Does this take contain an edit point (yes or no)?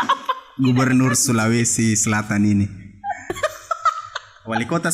yes